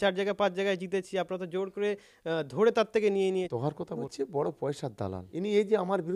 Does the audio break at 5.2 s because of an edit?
yes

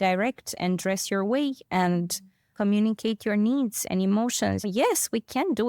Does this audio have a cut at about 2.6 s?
no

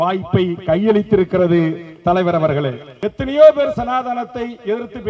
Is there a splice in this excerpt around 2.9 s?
yes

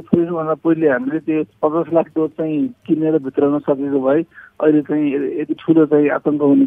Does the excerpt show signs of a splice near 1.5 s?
yes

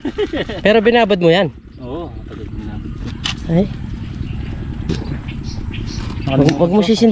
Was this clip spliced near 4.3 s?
no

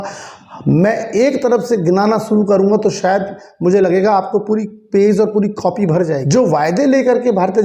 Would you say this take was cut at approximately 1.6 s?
no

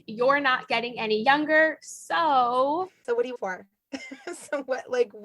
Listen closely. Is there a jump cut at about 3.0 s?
yes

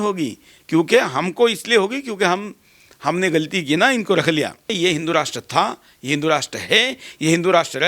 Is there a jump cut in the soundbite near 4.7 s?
yes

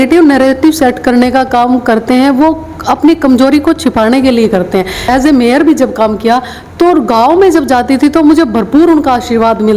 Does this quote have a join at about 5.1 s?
yes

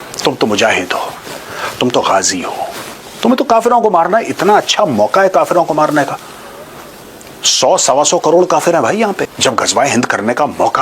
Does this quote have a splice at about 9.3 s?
yes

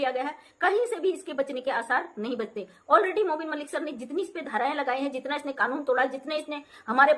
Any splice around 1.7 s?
no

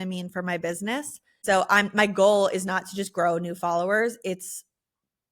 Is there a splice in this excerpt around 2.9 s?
no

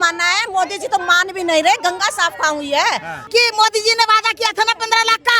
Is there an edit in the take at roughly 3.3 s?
yes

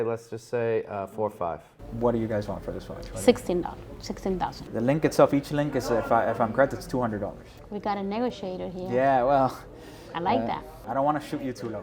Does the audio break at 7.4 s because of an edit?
yes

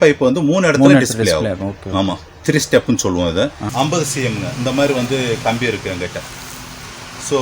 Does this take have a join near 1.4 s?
no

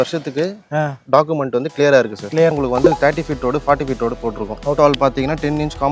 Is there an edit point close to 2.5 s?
yes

